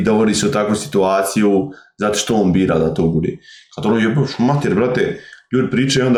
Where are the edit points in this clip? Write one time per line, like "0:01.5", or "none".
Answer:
none